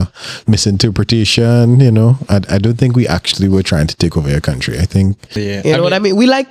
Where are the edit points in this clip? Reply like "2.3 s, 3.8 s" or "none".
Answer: 5.3 s